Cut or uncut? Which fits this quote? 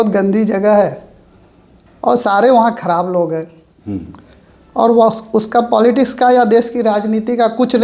uncut